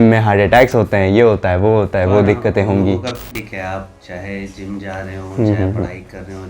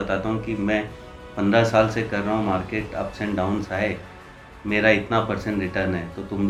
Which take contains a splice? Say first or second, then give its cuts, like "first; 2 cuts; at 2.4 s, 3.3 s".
first; 1 cut; at 3.4 s